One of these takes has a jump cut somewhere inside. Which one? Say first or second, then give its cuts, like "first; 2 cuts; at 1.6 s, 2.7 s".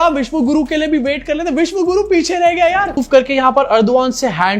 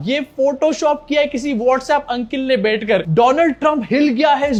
first; 1 cut; at 3.0 s